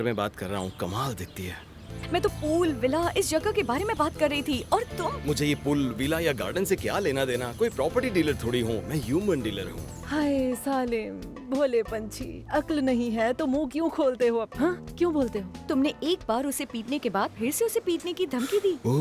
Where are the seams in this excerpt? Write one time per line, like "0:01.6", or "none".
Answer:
0:02.0
0:10.0
0:15.6